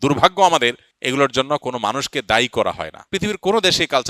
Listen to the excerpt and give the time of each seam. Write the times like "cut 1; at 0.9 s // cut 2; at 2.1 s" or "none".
cut 1; at 0.9 s // cut 2; at 2.9 s